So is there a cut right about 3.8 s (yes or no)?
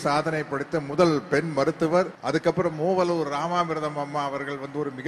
no